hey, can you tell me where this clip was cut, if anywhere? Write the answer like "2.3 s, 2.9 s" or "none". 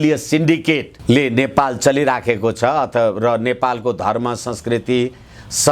0.9 s